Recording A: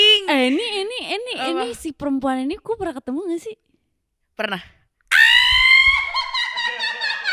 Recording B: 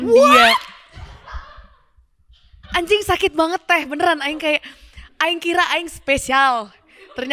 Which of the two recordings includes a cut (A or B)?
B